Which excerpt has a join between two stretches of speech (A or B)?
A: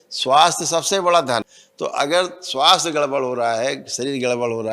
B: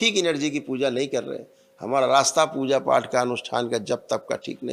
A